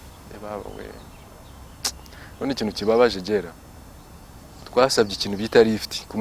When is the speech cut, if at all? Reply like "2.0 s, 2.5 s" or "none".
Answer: none